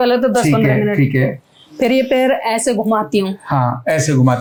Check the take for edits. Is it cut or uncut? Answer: uncut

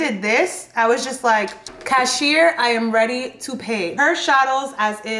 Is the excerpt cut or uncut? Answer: cut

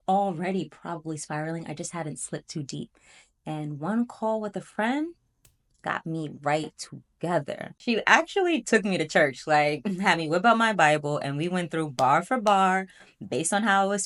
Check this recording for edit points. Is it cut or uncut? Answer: uncut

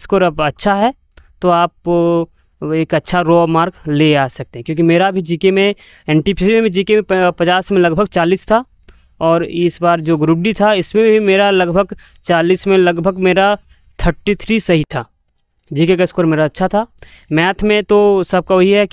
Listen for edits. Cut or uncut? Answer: uncut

